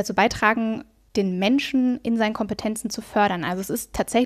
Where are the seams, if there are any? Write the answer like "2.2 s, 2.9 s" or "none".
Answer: 0.9 s